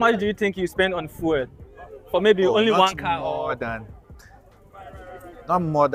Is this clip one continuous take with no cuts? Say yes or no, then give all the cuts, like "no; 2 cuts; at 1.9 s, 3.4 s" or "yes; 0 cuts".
yes; 0 cuts